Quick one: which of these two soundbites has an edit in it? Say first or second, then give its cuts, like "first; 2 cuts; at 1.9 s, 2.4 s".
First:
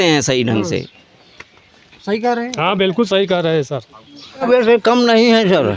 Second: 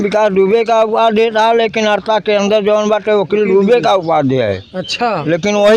first; 1 cut; at 4.4 s